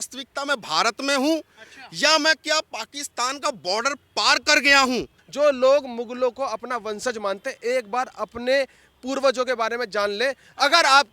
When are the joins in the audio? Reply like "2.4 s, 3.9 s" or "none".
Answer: 5.2 s